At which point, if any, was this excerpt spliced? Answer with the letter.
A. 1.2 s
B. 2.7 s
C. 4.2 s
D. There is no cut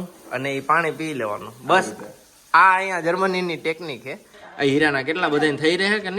C